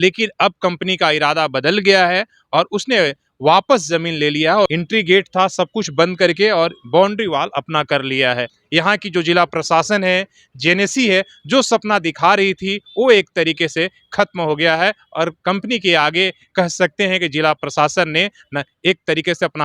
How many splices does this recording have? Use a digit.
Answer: 2